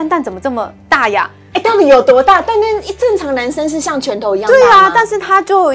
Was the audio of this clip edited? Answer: no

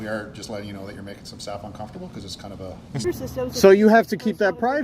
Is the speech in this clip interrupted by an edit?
yes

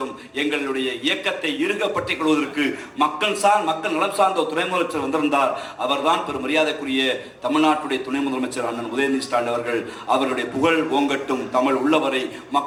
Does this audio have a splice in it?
no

